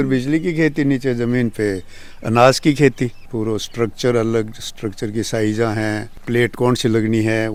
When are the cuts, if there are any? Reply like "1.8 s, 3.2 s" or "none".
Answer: none